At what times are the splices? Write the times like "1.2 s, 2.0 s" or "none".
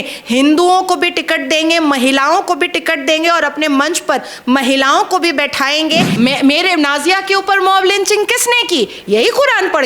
6.1 s